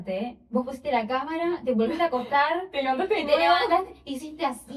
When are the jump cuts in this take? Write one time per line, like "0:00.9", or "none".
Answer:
none